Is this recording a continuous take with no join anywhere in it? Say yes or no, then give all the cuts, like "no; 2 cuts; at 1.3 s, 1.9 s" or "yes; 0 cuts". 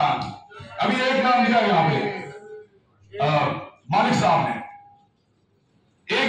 yes; 0 cuts